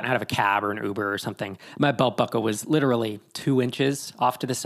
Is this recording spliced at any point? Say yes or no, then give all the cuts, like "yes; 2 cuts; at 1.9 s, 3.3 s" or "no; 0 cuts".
no; 0 cuts